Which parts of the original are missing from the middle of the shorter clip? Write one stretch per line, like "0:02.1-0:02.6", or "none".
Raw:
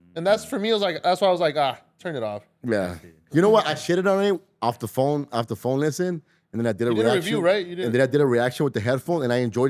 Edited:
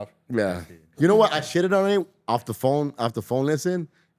none